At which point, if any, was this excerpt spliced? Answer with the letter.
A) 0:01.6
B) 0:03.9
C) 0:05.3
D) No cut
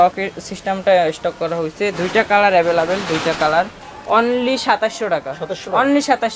B